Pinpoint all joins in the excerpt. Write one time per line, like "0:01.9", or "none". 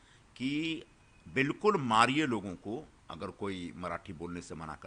none